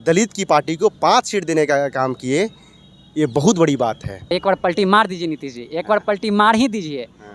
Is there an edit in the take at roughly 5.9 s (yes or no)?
no